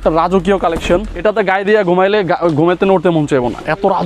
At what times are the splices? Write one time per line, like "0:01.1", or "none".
0:01.1